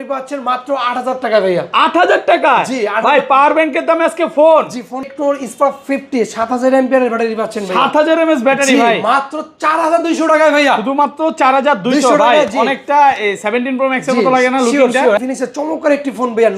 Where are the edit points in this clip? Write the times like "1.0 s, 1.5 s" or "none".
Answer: 5.1 s, 15.2 s